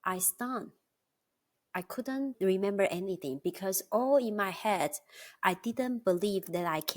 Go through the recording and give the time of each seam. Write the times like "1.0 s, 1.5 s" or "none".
2.3 s